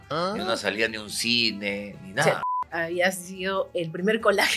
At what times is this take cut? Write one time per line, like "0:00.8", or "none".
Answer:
0:02.4